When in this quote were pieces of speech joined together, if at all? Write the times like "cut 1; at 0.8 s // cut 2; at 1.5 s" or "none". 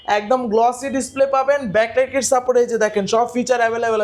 none